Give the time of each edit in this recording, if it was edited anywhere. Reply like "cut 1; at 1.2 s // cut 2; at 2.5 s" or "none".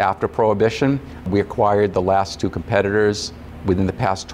none